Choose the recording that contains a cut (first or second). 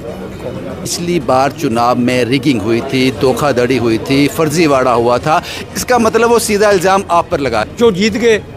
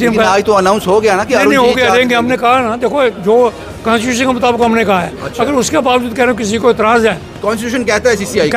first